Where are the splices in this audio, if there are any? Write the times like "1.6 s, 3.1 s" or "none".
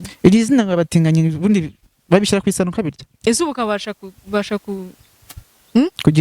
3.1 s